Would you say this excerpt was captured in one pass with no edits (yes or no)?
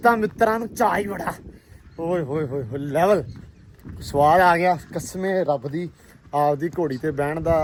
yes